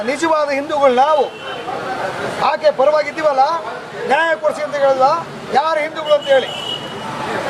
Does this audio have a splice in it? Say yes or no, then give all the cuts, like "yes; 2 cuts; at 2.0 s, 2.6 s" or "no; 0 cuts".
no; 0 cuts